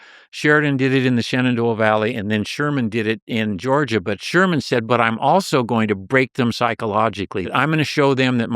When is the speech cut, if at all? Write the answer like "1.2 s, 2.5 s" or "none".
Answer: 7.5 s